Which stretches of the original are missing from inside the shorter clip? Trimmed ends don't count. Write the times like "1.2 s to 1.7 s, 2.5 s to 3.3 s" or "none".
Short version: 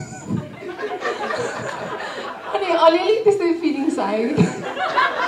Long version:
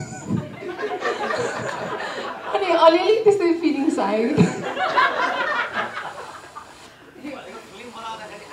none